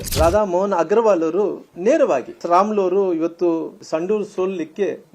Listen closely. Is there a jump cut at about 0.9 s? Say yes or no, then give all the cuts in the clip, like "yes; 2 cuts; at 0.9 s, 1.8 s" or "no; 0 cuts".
no; 2 cuts; at 2.3 s, 3.8 s